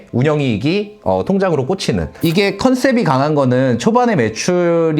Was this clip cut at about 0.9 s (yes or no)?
no